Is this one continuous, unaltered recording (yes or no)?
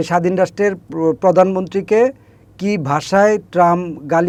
yes